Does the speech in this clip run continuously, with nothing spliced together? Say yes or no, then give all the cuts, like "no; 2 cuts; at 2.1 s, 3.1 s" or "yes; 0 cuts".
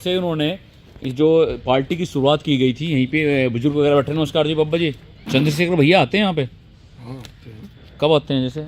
no; 1 cut; at 5.1 s